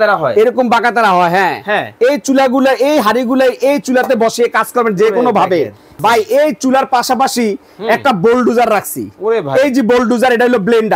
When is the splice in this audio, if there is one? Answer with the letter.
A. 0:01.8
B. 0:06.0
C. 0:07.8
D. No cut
B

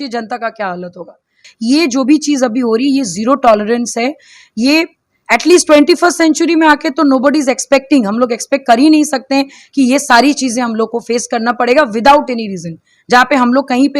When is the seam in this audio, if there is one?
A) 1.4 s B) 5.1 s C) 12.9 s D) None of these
A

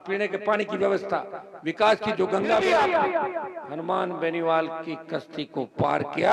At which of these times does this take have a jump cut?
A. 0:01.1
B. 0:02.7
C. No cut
B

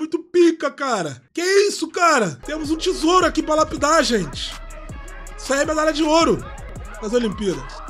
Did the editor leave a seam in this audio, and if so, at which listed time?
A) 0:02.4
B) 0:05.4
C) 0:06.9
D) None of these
A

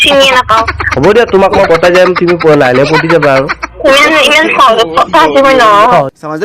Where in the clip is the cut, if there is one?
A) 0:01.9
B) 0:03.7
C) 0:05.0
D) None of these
B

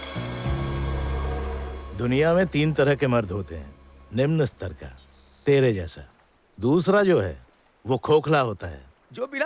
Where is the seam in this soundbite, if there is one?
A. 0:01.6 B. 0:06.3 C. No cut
A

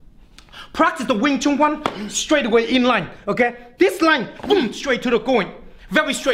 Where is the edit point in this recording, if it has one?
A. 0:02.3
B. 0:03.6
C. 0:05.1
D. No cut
D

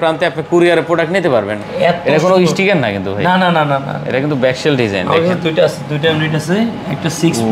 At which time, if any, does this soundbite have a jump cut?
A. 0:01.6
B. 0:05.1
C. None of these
A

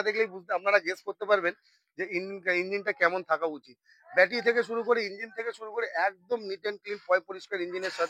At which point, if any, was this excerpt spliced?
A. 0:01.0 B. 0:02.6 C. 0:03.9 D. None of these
D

